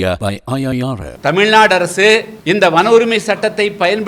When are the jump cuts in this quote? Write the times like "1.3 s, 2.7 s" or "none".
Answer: 1.1 s, 2.3 s